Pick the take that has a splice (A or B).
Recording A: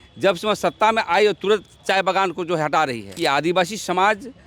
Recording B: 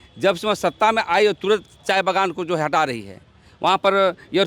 A